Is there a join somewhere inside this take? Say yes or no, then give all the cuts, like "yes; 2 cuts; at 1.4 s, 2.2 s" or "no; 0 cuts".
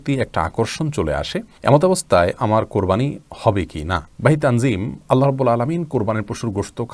no; 0 cuts